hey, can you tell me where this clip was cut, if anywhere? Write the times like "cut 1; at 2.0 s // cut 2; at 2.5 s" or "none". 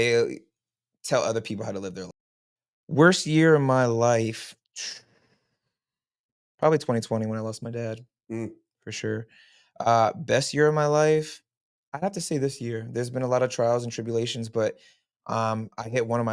cut 1; at 2.1 s

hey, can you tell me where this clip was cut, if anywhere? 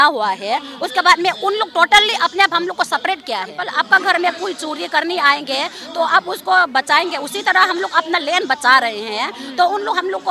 cut 1; at 3.6 s

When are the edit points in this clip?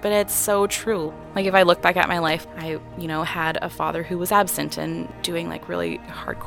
cut 1; at 1.1 s // cut 2; at 2.4 s // cut 3; at 5.1 s

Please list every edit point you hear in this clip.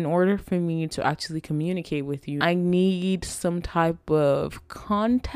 cut 1; at 2.4 s

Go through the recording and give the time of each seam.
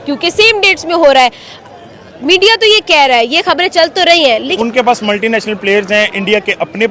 cut 1; at 4.5 s

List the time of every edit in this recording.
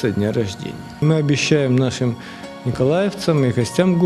cut 1; at 1.0 s

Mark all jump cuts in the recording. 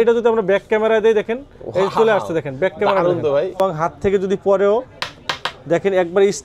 cut 1; at 3.6 s

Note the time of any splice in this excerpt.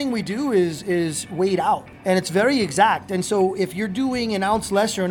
cut 1; at 1.9 s

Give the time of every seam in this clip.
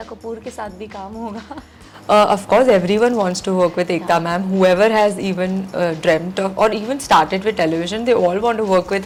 none

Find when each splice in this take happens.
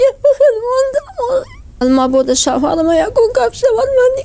cut 1; at 1.8 s

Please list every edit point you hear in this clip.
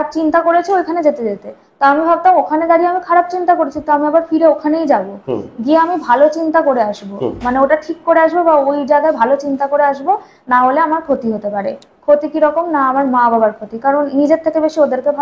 none

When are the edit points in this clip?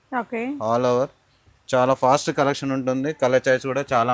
none

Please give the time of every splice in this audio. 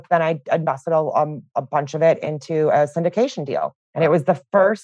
cut 1; at 1.5 s // cut 2; at 3.8 s

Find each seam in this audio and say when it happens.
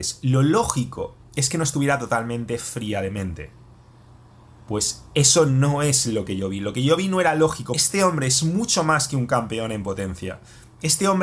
cut 1; at 7.8 s

